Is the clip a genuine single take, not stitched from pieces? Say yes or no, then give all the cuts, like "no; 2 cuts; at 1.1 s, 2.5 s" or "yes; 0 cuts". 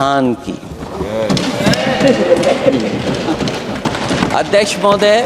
no; 1 cut; at 3.8 s